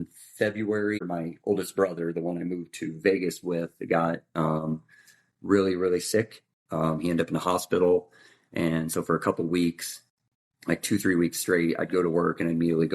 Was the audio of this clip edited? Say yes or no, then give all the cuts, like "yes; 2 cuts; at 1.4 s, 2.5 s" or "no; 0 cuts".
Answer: yes; 1 cut; at 1.0 s